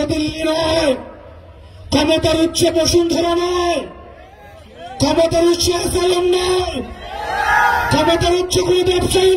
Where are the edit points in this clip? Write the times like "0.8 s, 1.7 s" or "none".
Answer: none

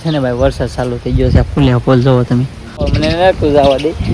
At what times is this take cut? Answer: 2.9 s

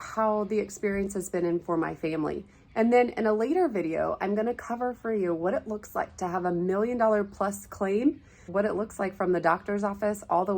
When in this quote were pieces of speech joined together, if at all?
8.5 s

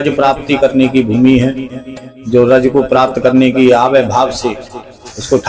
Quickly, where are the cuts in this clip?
none

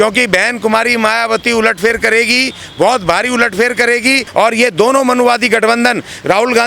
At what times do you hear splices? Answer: 4.2 s

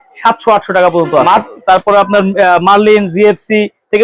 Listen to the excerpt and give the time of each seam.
1.5 s

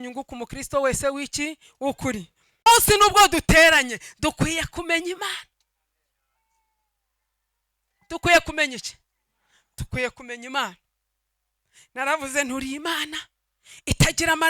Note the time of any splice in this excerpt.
2.7 s

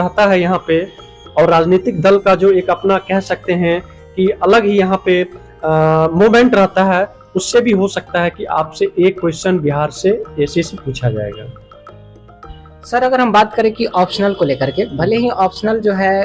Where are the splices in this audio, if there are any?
none

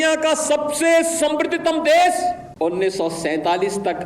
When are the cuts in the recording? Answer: 2.5 s

